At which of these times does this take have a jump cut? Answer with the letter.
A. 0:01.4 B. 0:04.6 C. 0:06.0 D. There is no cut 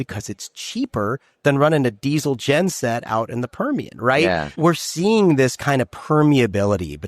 B